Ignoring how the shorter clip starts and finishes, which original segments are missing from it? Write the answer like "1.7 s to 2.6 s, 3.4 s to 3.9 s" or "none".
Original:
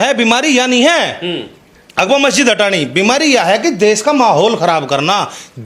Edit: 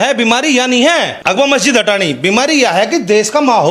1.1 s to 1.9 s